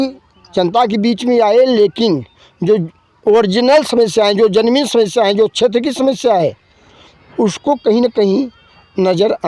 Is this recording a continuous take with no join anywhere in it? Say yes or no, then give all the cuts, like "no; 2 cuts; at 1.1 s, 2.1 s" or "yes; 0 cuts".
yes; 0 cuts